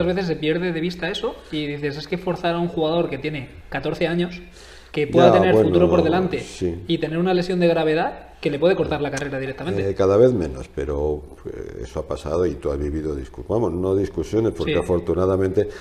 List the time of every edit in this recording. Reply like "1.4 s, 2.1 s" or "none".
none

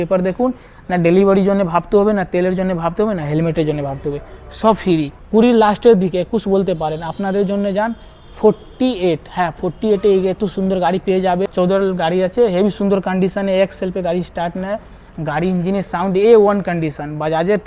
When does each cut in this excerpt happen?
5.2 s, 11.4 s

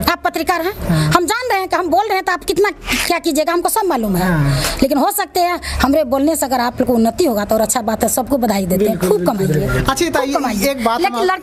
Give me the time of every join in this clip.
none

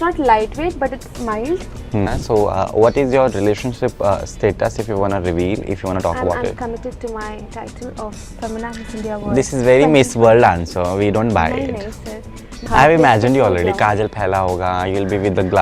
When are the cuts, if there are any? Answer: 2.1 s, 12.7 s

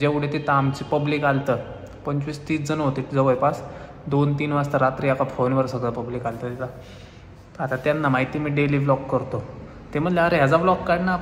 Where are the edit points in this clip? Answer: none

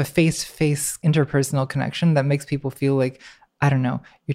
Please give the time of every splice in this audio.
1.0 s

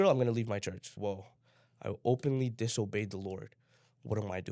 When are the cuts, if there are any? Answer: 0.9 s

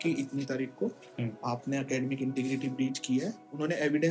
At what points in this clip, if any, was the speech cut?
none

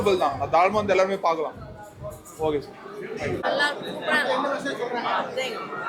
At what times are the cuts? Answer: 3.4 s

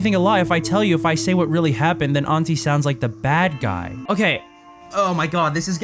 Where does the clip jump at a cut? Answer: 4.0 s

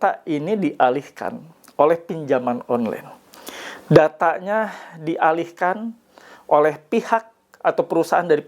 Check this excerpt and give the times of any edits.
none

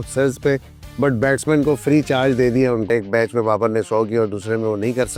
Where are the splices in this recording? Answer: 2.9 s

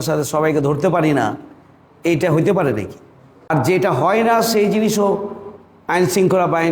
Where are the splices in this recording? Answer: 3.5 s

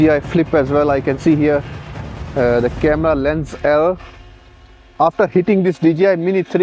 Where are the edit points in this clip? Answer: none

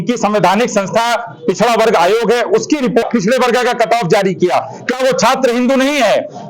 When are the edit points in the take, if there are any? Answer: 3.1 s

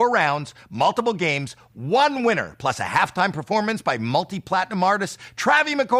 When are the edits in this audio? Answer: none

